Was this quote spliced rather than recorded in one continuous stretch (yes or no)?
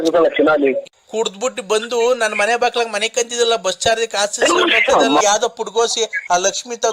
yes